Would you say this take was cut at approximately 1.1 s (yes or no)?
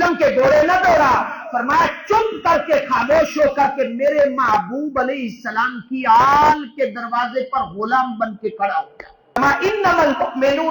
no